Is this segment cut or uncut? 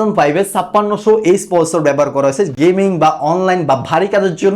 uncut